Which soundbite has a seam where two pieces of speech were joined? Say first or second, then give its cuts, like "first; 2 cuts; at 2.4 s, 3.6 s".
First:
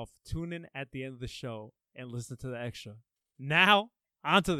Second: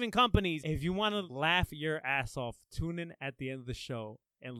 second; 1 cut; at 1.1 s